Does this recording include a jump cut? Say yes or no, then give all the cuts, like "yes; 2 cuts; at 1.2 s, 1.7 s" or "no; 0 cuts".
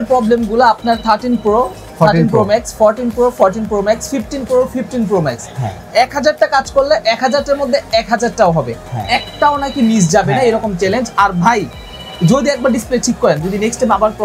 no; 0 cuts